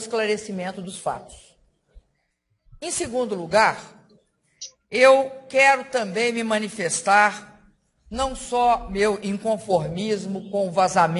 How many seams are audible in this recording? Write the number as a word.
zero